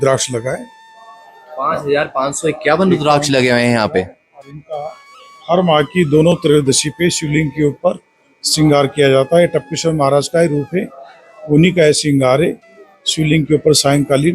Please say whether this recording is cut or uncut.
uncut